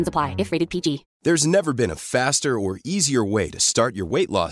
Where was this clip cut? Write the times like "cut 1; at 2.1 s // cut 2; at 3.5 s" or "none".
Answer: cut 1; at 1.1 s